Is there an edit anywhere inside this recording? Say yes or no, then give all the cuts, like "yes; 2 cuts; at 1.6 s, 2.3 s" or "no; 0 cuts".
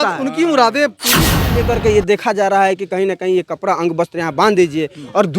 yes; 1 cut; at 1.3 s